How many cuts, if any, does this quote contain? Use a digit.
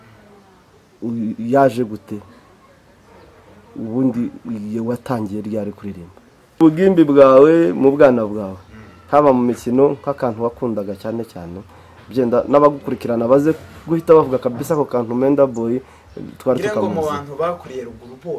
1